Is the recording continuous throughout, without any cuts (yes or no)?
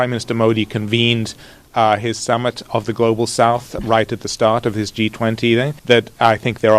no